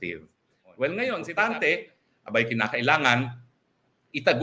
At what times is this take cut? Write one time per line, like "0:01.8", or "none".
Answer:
0:01.3